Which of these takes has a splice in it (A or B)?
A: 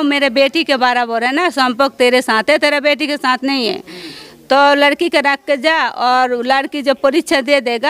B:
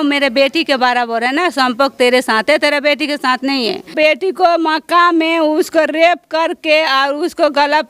B